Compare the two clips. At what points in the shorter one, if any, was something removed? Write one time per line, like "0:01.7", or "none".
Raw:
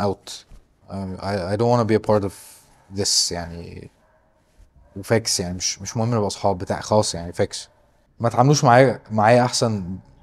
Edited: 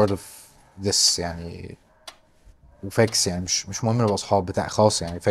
none